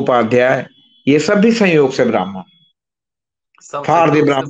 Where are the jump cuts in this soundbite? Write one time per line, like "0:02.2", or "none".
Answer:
none